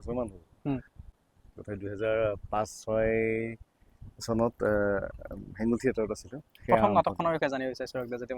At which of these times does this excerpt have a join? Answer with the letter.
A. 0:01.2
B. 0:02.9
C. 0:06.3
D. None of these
A